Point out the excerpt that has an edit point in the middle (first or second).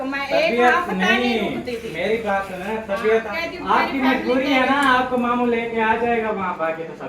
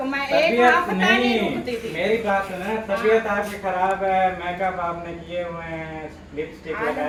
first